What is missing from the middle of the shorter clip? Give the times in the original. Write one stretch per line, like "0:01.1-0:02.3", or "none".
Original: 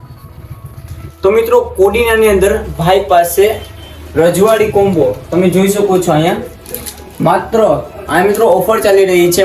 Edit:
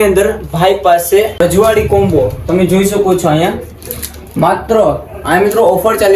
0:03.7-0:04.2